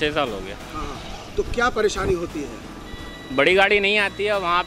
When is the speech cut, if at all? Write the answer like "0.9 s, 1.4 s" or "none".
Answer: none